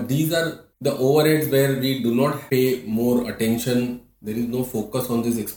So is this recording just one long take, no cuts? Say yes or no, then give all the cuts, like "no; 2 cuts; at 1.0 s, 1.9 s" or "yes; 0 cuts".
yes; 0 cuts